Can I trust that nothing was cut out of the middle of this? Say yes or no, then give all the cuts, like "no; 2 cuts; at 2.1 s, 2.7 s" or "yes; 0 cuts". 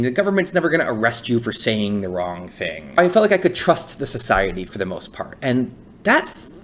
no; 2 cuts; at 3.0 s, 4.7 s